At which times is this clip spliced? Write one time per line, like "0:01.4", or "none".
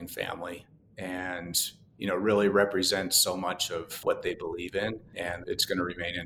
0:04.0
0:05.3